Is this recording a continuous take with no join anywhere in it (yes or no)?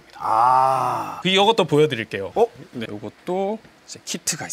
no